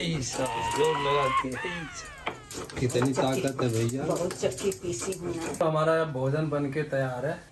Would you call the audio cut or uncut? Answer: cut